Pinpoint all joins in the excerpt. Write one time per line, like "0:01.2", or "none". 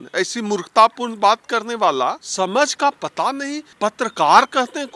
0:02.2
0:03.6